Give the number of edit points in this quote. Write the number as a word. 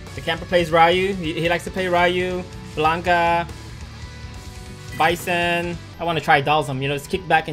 one